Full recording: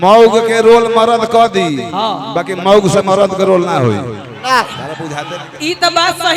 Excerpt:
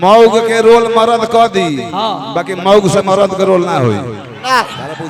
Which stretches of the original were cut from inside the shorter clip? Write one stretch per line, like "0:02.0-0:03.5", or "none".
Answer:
none